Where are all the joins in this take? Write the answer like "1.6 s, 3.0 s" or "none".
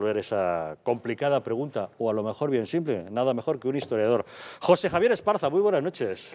2.0 s